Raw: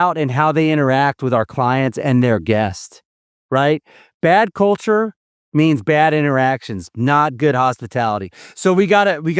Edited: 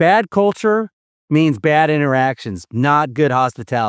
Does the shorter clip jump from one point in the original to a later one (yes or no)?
no